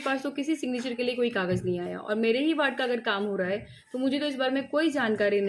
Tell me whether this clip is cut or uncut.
uncut